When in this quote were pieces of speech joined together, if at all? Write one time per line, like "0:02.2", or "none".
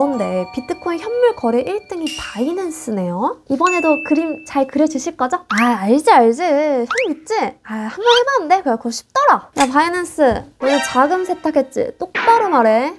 none